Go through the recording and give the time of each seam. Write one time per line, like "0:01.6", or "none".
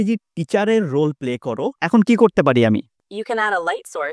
0:01.8